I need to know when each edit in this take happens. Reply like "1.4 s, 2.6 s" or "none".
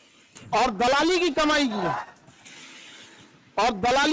none